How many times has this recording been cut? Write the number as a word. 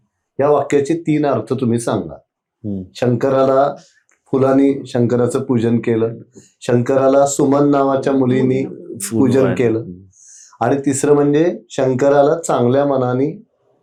zero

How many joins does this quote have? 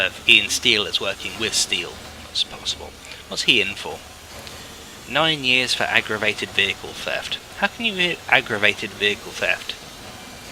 zero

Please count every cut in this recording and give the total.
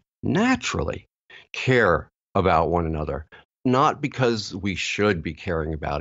one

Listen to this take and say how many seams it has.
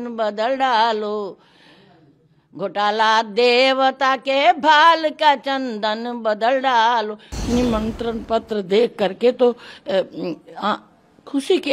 one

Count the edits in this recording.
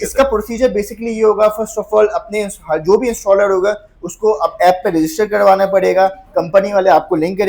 zero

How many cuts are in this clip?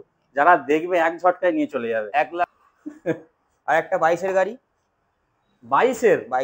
one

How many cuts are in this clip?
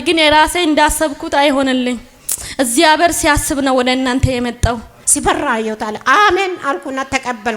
one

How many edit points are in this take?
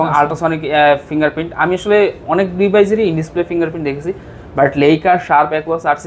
zero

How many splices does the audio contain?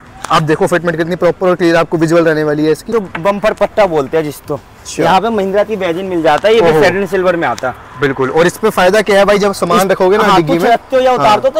one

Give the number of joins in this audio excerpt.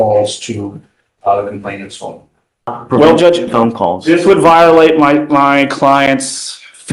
one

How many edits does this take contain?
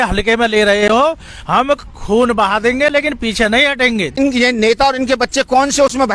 one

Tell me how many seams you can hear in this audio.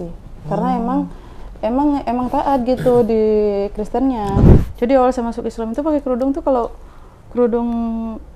one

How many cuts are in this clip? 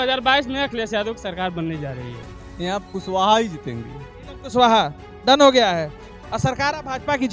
one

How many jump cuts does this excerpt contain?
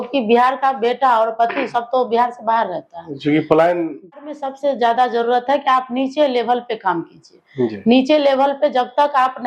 one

